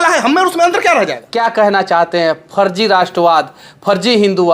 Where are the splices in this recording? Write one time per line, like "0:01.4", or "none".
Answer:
0:01.2